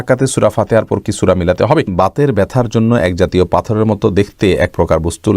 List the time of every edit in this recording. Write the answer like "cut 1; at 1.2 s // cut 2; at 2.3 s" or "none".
cut 1; at 1.9 s